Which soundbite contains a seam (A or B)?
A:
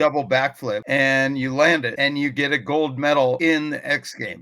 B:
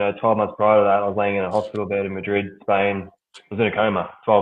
A